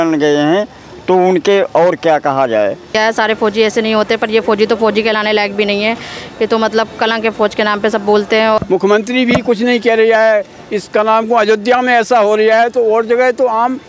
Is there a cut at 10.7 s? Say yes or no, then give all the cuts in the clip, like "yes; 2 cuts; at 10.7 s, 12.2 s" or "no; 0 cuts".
no; 2 cuts; at 3.0 s, 8.6 s